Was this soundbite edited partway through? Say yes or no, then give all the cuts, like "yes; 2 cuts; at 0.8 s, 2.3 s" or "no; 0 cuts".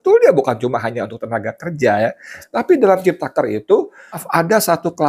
yes; 2 cuts; at 2.5 s, 4.2 s